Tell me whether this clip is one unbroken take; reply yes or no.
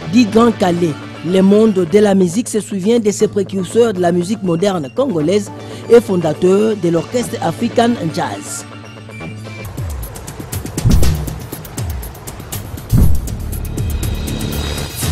no